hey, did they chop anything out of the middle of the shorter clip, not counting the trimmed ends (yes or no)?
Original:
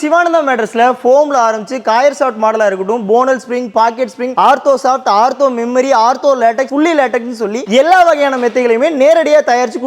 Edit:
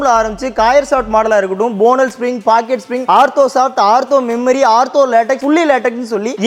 no